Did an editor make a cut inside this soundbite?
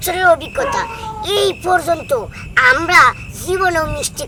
no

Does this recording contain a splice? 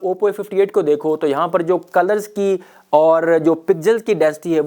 no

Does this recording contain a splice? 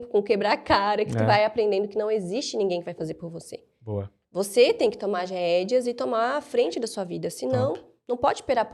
no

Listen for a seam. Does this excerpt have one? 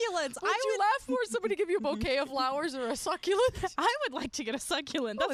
no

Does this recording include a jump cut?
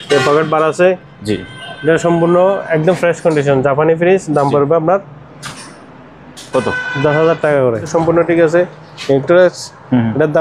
yes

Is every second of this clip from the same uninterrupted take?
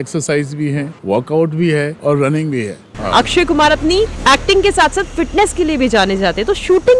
no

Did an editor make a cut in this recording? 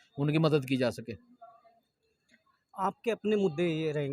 no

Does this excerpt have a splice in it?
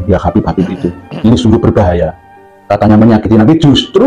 no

